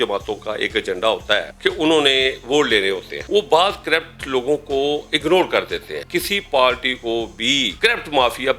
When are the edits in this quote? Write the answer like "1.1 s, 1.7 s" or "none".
1.5 s, 3.1 s, 6.0 s, 7.7 s